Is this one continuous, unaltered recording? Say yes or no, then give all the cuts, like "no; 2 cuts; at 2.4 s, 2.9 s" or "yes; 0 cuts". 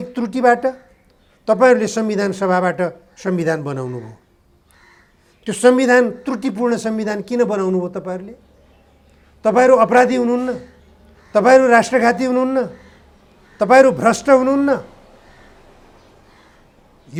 yes; 0 cuts